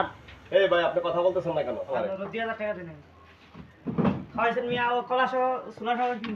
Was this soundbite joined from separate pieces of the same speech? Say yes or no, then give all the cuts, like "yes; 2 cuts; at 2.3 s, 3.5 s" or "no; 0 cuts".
yes; 1 cut; at 1.9 s